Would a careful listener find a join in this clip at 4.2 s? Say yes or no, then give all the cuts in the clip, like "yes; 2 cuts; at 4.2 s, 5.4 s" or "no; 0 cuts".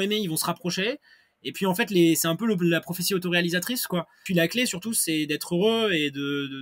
yes; 1 cut; at 4.2 s